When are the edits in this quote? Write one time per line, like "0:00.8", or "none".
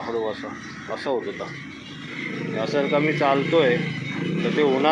none